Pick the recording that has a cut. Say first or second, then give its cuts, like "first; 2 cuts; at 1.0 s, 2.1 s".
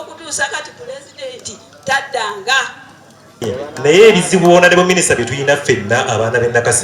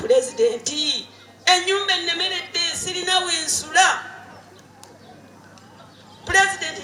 first; 1 cut; at 3.4 s